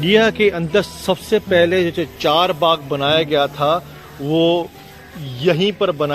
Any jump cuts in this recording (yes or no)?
no